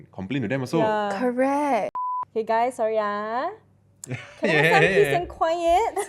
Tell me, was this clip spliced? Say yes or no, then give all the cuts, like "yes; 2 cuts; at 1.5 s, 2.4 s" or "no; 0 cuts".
yes; 1 cut; at 2.0 s